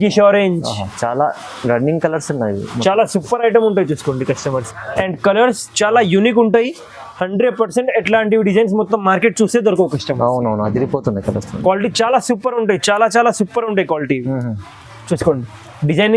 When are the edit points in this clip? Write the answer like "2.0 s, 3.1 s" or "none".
4.7 s